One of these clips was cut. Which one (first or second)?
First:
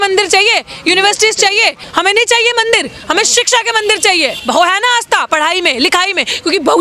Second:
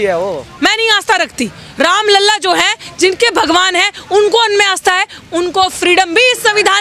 first